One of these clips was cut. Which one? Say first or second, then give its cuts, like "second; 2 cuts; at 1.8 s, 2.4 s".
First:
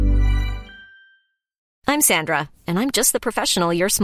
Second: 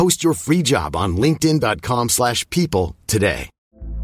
first; 1 cut; at 1.5 s